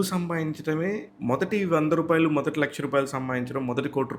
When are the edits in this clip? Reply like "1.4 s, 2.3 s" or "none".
1.1 s